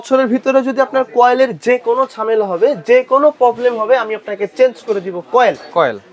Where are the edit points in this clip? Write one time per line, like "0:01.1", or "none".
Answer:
none